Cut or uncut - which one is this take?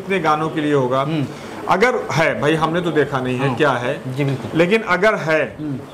uncut